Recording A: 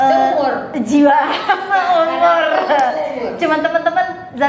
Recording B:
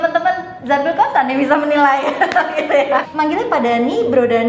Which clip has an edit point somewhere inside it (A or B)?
B